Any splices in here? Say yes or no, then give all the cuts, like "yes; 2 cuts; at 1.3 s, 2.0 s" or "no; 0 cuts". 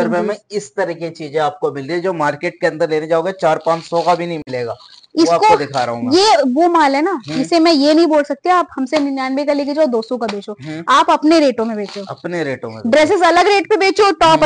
no; 0 cuts